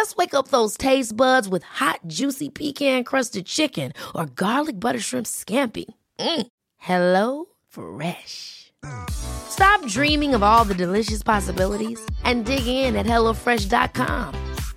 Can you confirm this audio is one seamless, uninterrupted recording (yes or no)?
yes